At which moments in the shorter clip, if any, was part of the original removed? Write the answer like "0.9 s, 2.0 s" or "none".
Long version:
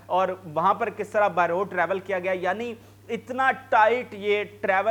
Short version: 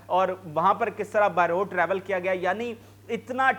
none